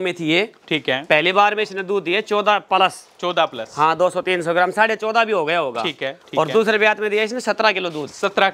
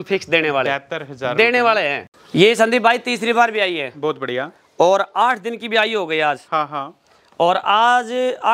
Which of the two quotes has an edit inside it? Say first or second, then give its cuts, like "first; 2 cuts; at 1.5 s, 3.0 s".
second; 1 cut; at 2.1 s